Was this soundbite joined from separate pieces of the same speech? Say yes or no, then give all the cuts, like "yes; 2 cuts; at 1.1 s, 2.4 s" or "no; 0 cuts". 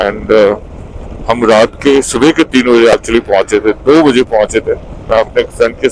no; 0 cuts